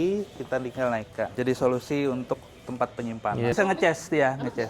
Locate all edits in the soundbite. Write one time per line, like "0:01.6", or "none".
0:01.2
0:03.5

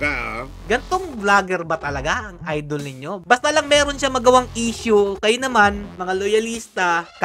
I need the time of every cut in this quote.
none

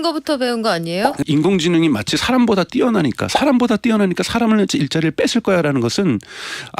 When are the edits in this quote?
0:01.2

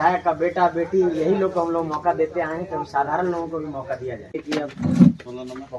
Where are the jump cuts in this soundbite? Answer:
0:04.4

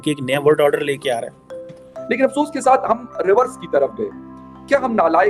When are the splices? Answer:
0:02.0

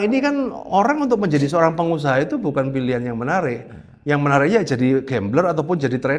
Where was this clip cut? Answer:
none

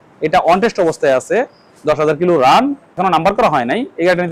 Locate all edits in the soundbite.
0:02.9

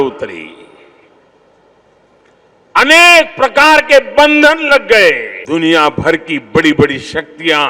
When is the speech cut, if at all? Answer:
0:05.4

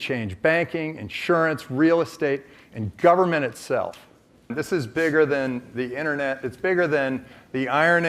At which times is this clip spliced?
0:04.5

